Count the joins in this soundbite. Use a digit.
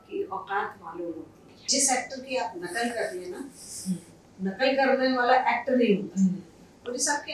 1